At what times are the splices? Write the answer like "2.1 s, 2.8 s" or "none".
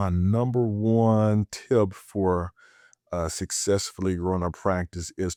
none